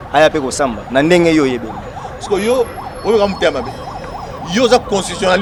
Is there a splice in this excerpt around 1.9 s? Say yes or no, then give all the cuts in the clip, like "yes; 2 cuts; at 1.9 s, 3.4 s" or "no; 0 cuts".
no; 0 cuts